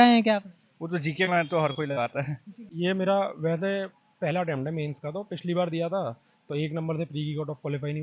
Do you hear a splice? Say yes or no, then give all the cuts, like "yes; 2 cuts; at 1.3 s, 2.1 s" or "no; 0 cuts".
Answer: yes; 1 cut; at 2.6 s